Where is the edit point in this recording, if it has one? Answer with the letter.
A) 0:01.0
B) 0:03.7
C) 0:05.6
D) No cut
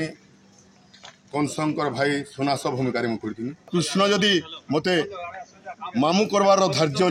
B